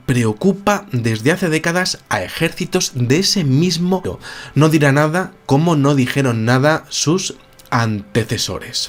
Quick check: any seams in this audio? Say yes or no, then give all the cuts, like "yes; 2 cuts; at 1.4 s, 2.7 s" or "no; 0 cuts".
no; 0 cuts